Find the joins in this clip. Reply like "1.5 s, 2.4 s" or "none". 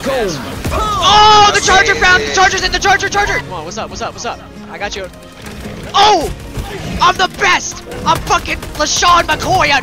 3.4 s